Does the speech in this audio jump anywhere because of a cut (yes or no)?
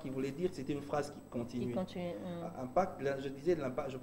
no